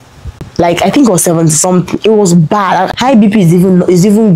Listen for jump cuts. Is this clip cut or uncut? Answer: cut